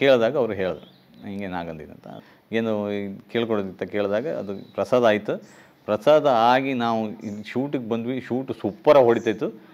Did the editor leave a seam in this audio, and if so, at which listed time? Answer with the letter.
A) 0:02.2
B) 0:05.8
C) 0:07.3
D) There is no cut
A